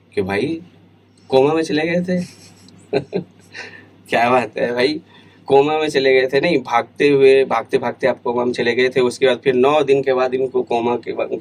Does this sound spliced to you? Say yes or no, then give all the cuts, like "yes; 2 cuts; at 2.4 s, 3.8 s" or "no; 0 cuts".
no; 0 cuts